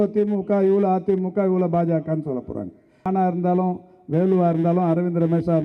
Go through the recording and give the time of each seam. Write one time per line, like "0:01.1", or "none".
0:03.1